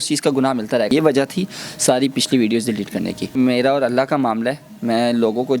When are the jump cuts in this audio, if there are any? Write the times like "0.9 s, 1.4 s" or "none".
0.9 s, 3.4 s